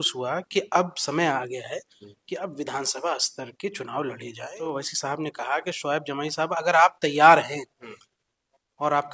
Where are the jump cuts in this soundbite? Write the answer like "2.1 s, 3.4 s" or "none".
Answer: 4.6 s